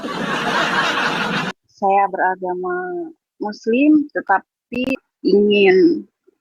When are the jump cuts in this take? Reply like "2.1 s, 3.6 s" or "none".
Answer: 1.6 s, 5.1 s